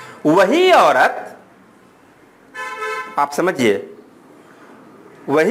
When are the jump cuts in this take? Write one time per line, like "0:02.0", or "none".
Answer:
none